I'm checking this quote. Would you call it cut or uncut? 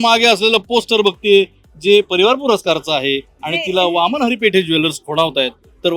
uncut